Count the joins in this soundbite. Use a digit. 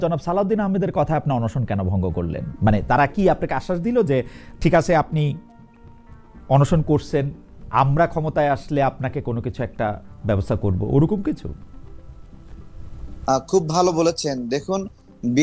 0